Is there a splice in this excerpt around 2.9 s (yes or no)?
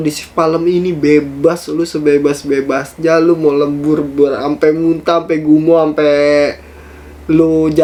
no